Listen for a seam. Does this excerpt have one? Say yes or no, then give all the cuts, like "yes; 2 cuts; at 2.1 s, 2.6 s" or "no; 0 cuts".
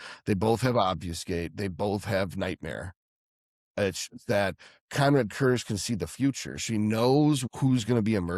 yes; 1 cut; at 7.4 s